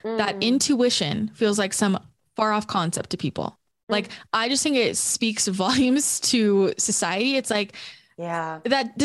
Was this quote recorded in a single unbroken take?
yes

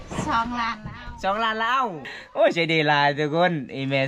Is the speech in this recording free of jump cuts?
no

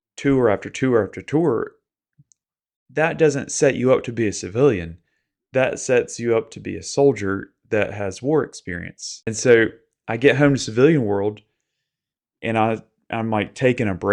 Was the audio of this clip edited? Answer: yes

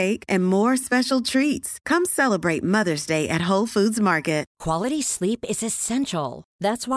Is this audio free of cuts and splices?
no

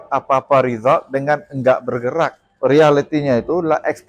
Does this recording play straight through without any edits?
no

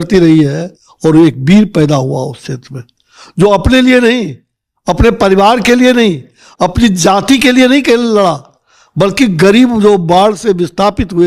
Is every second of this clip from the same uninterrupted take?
yes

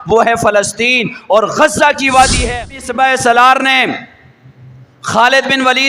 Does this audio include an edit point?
yes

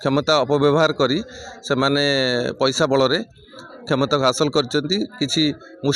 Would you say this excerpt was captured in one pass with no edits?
yes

